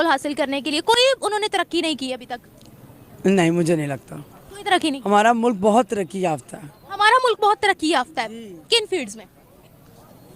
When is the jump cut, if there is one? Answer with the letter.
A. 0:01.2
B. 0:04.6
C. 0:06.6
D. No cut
D